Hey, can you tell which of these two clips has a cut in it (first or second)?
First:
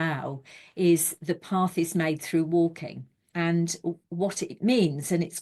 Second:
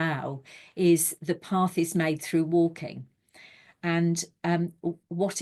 first